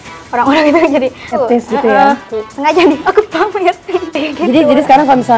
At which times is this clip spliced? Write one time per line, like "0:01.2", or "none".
0:01.3
0:02.3
0:04.2